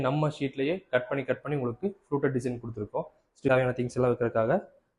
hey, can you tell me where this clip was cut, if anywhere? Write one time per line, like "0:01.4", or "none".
0:03.5